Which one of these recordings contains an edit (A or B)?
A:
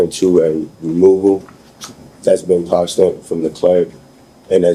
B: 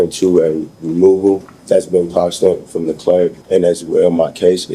B